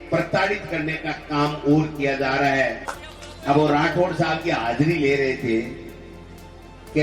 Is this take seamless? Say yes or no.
no